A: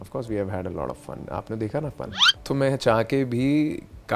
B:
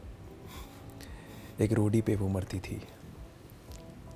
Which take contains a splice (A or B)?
A